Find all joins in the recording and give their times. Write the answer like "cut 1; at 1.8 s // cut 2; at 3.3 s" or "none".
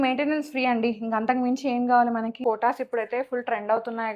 cut 1; at 2.4 s

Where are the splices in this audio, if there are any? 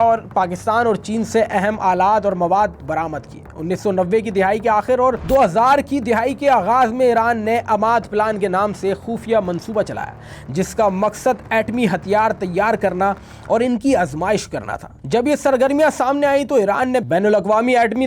none

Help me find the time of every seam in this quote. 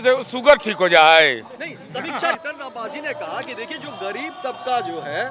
cut 1; at 2.4 s

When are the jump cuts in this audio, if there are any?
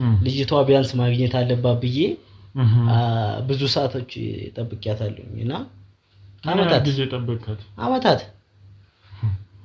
none

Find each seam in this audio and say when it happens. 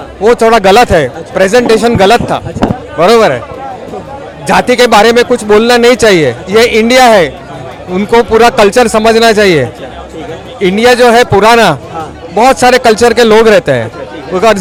none

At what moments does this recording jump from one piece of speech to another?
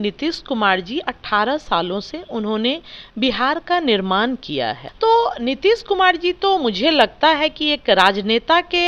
cut 1; at 4.8 s

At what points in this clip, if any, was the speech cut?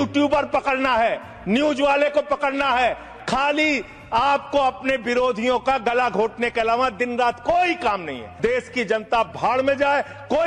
cut 1; at 3.1 s // cut 2; at 8.3 s

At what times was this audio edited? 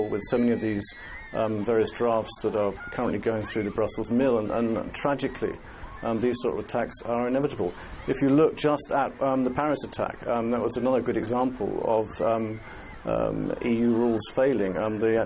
none

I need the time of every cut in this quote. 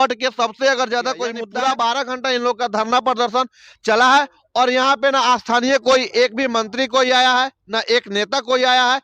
cut 1; at 1.4 s

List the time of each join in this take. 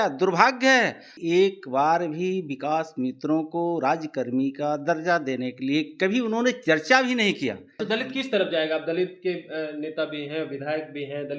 cut 1; at 1.1 s // cut 2; at 7.7 s

